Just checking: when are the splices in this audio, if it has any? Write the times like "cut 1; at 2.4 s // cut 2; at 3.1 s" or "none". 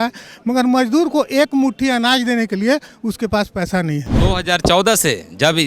cut 1; at 4.1 s